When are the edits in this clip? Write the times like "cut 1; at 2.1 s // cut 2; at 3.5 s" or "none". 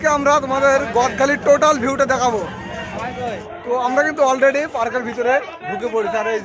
cut 1; at 3.5 s

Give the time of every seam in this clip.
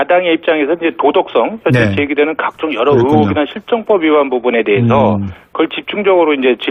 none

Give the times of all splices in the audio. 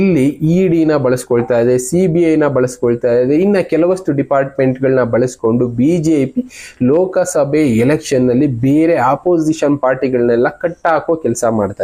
none

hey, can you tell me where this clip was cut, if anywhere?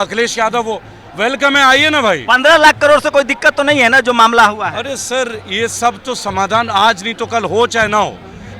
none

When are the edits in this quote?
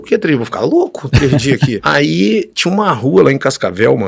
cut 1; at 1.8 s

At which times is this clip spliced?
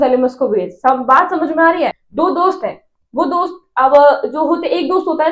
cut 1; at 2.0 s

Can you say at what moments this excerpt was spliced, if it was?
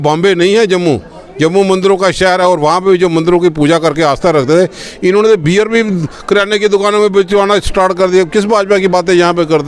none

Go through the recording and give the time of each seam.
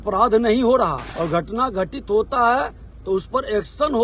cut 1; at 1.0 s

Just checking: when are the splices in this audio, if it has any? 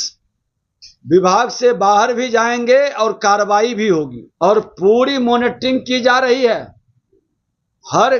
cut 1; at 4.2 s

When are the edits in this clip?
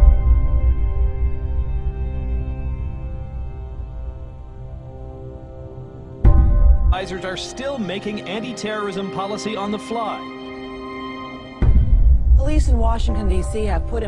none

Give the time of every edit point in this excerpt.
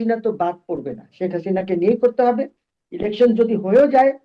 none

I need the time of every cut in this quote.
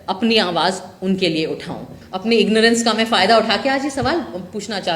cut 1; at 2.0 s

